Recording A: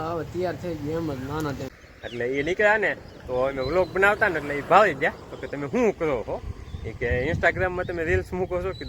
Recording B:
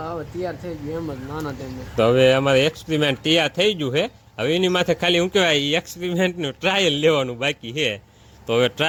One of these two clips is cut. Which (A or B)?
A